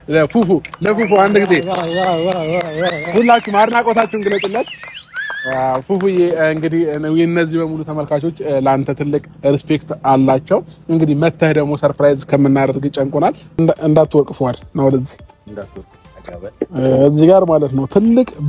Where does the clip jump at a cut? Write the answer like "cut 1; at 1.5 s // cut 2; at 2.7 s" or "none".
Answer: cut 1; at 13.6 s